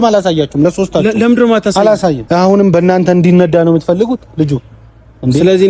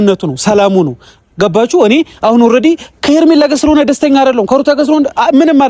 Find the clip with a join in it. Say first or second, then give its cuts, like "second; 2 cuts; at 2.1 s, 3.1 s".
first; 1 cut; at 2.2 s